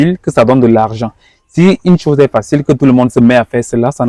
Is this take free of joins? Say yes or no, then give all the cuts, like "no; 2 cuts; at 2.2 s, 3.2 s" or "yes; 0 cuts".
yes; 0 cuts